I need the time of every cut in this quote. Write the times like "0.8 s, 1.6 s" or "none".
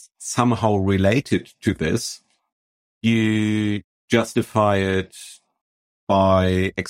none